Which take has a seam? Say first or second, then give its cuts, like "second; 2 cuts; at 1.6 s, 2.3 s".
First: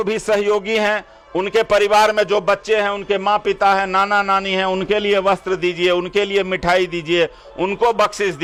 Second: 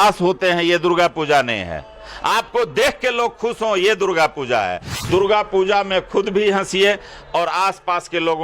second; 1 cut; at 4.9 s